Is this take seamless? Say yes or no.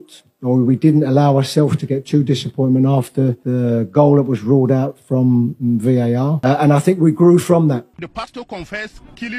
no